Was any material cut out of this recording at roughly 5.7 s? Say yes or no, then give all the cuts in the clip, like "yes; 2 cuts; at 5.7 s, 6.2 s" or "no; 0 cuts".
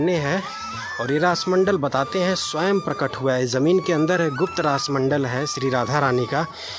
no; 0 cuts